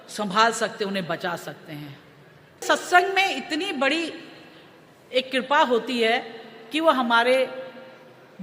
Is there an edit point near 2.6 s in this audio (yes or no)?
yes